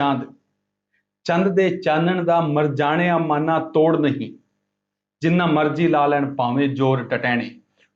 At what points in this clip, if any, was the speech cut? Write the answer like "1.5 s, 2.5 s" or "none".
none

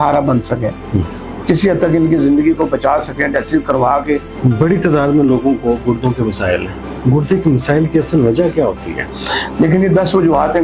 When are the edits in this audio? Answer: 4.3 s

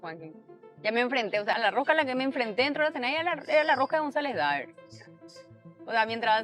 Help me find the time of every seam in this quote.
1.5 s

